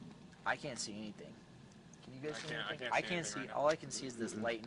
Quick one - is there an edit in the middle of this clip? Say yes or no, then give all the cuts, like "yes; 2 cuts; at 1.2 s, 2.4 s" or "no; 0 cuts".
no; 0 cuts